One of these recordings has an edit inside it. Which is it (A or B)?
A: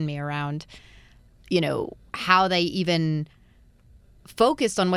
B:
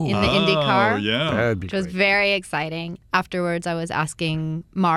B